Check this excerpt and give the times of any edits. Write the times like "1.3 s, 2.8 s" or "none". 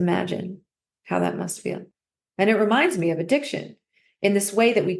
1.9 s